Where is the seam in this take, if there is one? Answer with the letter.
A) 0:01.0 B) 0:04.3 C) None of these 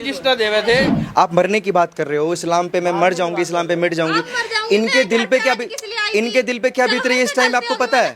A